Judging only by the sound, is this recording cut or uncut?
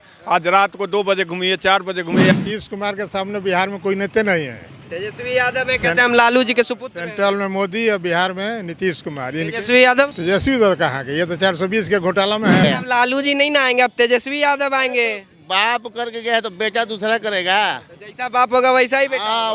cut